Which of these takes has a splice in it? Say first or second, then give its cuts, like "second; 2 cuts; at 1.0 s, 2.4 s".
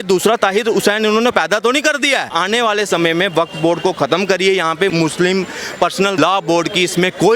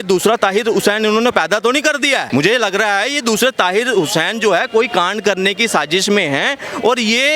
first; 3 cuts; at 2.2 s, 4.9 s, 6.2 s